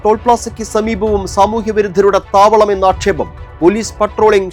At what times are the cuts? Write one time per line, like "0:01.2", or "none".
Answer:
none